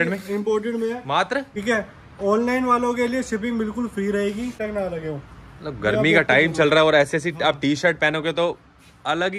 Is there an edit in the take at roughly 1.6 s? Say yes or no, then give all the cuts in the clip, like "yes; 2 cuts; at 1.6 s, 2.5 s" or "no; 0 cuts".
yes; 2 cuts; at 1.6 s, 4.6 s